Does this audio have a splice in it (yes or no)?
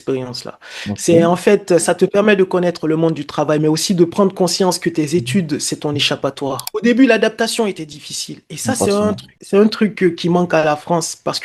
yes